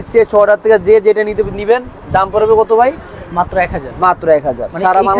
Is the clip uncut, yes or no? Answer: yes